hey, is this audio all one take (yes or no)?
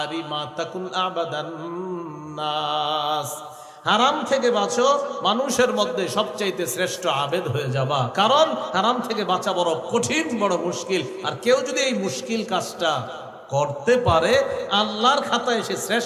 yes